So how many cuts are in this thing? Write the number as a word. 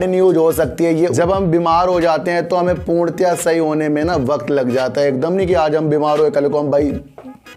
one